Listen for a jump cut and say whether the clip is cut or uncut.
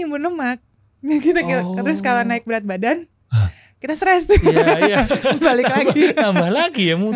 uncut